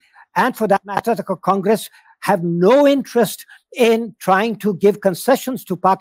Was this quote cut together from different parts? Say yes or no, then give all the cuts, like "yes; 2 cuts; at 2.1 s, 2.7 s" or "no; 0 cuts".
no; 0 cuts